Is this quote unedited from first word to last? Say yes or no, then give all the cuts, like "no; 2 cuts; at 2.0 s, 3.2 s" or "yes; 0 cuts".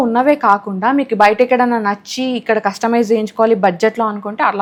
yes; 0 cuts